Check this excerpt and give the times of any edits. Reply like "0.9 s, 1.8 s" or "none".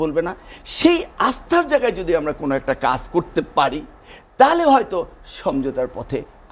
none